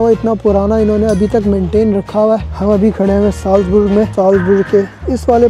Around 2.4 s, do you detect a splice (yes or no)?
yes